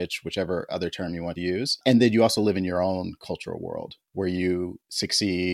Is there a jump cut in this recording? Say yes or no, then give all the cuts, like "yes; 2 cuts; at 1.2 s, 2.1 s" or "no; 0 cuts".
yes; 1 cut; at 1.5 s